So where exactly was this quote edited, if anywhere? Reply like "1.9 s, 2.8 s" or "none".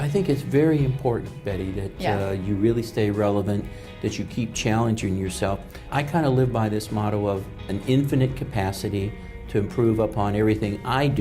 5.8 s